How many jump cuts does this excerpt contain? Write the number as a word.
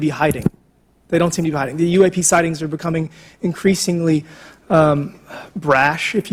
zero